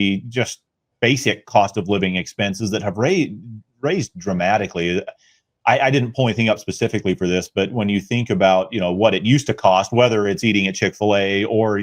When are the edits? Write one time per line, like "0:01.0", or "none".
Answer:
none

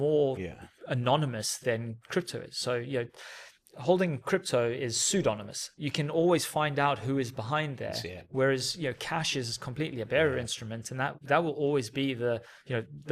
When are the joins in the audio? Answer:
none

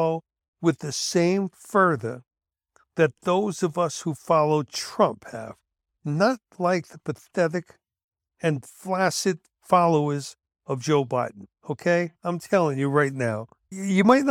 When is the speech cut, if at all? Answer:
none

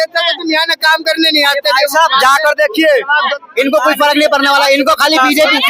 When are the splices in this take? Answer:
0:03.3

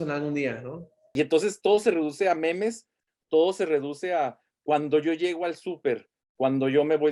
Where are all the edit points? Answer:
0:01.1

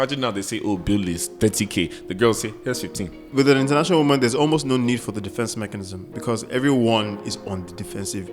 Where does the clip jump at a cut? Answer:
0:03.2

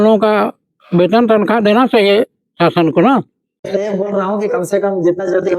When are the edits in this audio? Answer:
0:03.6

